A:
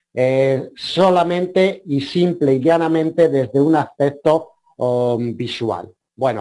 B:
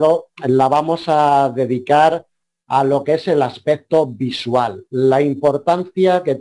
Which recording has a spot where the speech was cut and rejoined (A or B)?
A